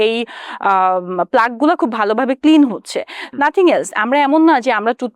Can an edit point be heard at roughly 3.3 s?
yes; 1 cut; at 3.3 s

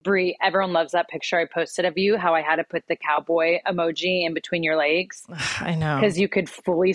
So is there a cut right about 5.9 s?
no; 0 cuts

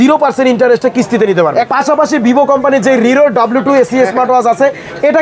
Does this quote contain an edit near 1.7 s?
yes; 1 cut; at 1.7 s

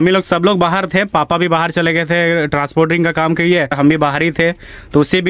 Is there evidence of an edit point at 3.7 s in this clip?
yes; 1 cut; at 3.7 s

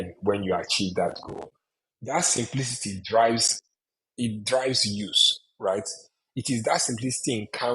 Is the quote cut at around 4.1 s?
no; 1 cut; at 1.9 s

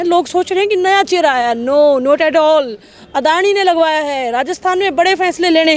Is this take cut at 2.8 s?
no; 0 cuts

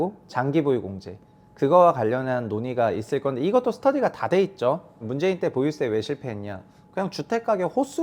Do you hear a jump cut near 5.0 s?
yes; 1 cut; at 5.0 s

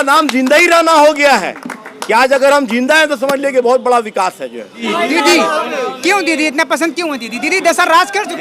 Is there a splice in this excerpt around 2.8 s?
no; 1 cut; at 4.8 s

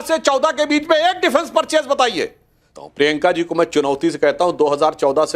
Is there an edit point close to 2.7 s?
yes; 1 cut; at 2.7 s

